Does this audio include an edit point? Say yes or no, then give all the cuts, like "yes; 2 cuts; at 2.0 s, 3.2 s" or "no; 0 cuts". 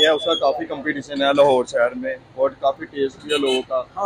no; 0 cuts